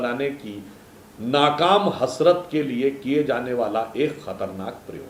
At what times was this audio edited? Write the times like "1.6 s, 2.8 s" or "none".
none